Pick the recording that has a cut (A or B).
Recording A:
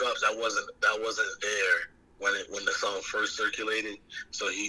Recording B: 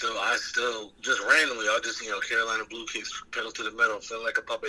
B